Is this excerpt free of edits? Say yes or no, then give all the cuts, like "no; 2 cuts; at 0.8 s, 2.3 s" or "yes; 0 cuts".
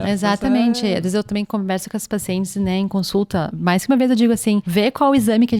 no; 2 cuts; at 3.5 s, 4.7 s